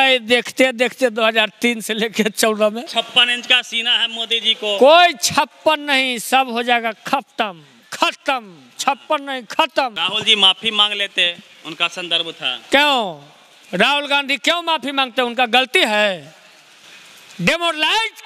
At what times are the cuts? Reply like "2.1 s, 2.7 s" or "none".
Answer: 2.8 s, 10.0 s